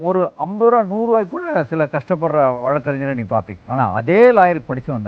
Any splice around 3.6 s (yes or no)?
yes